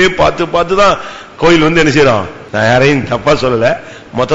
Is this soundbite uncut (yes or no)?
no